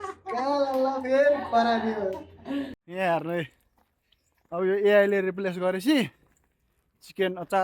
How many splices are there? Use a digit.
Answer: 1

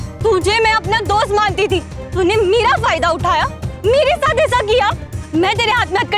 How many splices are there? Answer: 1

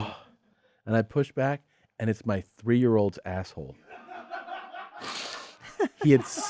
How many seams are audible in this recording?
0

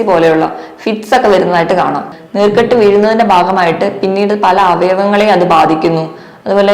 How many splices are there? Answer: 1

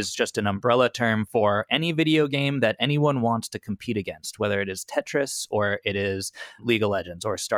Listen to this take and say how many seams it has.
1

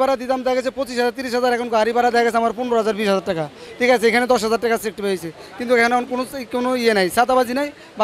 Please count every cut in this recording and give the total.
0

